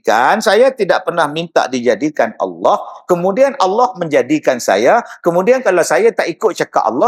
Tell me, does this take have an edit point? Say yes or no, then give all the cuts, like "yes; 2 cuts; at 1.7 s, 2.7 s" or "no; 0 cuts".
no; 0 cuts